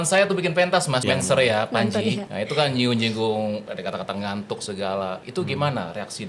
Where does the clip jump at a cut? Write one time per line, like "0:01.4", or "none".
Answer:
0:01.0
0:02.3
0:03.7
0:05.2